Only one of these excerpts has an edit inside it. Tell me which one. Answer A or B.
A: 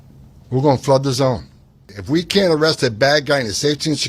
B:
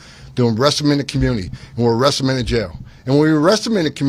A